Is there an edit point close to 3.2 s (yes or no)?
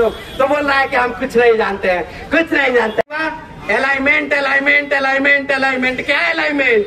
yes